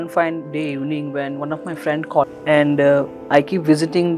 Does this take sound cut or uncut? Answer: cut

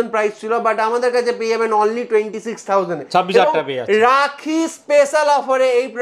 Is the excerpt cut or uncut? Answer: uncut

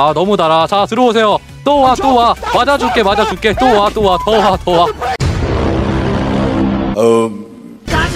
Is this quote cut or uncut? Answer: uncut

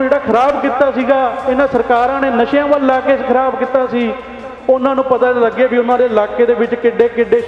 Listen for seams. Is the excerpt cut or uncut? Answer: uncut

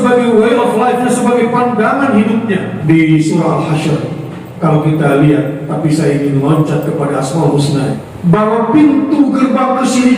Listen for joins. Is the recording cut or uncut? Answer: cut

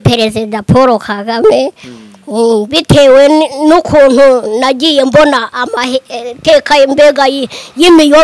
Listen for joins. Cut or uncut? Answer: uncut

